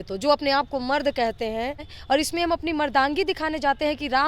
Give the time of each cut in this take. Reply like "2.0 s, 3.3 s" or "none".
1.8 s